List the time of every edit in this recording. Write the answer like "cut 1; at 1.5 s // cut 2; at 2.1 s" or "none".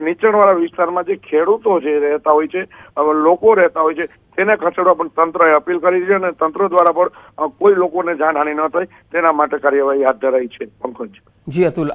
cut 1; at 6.8 s